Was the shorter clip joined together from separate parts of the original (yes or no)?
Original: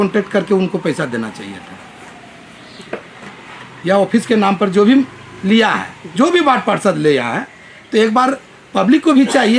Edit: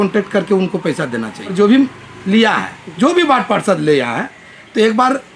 yes